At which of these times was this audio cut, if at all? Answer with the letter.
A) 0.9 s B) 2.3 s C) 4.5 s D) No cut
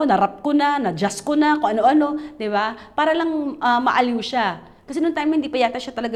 D